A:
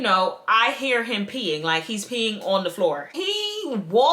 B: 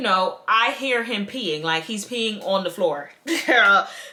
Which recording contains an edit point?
A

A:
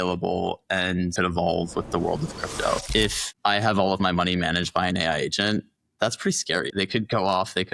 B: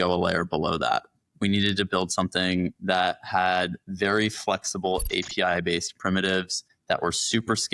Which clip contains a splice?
A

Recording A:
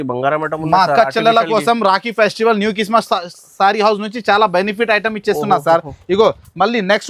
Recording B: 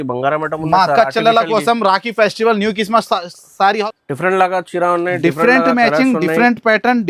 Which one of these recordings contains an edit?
B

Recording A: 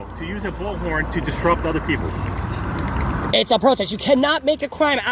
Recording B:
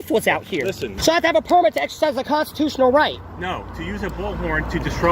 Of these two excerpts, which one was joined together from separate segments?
B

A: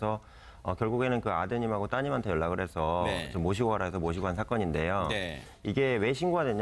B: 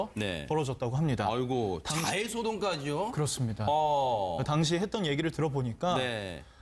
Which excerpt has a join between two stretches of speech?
B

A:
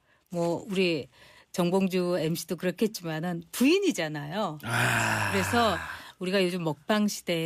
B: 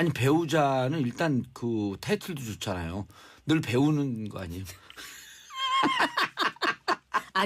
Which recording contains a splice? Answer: B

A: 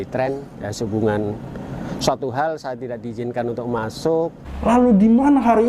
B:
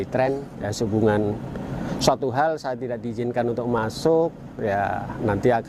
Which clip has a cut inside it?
A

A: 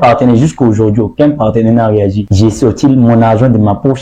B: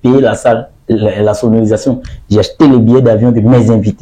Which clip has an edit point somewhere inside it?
A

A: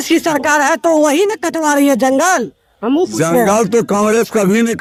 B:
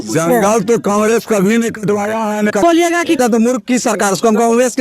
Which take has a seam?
B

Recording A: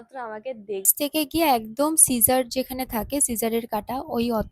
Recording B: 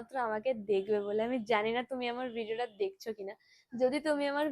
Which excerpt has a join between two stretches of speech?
A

